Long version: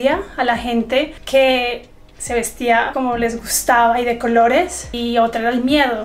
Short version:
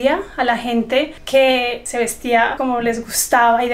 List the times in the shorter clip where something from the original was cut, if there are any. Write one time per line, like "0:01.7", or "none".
0:01.8